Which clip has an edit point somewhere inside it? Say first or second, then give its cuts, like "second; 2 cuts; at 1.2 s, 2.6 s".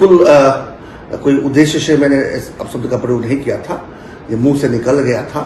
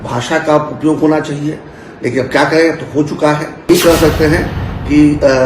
second; 1 cut; at 3.7 s